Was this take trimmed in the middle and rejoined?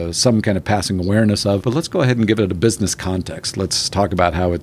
yes; 1 cut; at 1.6 s

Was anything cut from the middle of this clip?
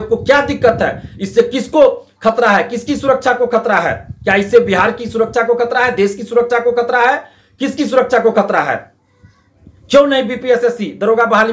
no; 0 cuts

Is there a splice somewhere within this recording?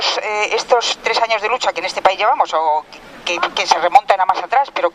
yes; 1 cut; at 1.3 s

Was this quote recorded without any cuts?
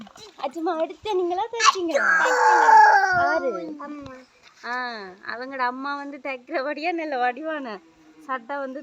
yes; 0 cuts

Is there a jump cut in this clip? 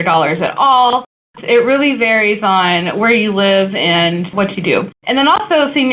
yes; 2 cuts; at 1.1 s, 4.5 s

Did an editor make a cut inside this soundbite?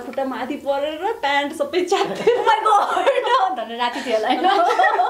no; 0 cuts

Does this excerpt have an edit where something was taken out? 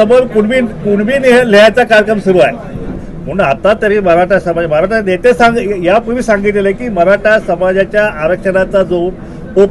yes; 1 cut; at 3.0 s

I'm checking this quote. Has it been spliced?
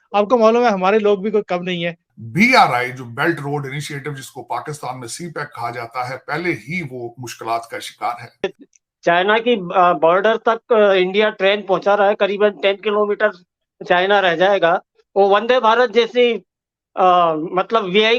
yes; 2 cuts; at 2.3 s, 8.6 s

